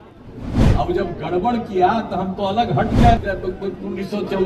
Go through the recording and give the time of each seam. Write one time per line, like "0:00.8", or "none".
0:03.2